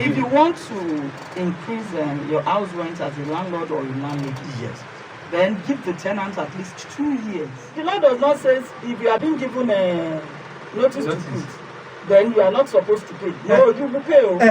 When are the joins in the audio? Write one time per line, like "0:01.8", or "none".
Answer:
0:07.6
0:09.2